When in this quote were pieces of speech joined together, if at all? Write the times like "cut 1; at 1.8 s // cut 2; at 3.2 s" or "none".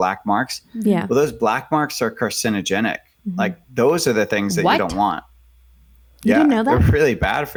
none